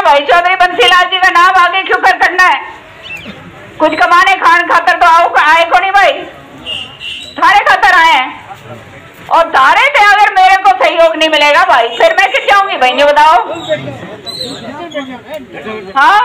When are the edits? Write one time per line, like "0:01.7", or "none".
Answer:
none